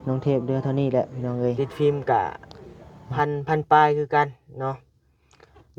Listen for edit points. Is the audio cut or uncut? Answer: cut